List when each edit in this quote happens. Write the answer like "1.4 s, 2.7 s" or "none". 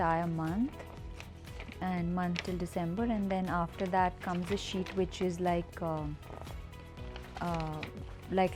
none